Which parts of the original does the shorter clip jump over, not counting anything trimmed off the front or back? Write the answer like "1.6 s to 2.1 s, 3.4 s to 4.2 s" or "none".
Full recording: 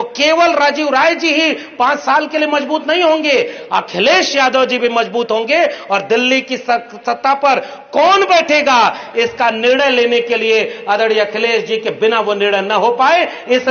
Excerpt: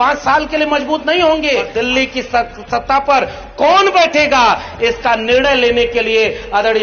3.5 s to 6.0 s